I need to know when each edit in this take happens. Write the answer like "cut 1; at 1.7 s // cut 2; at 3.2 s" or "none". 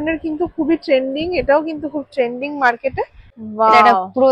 cut 1; at 3.2 s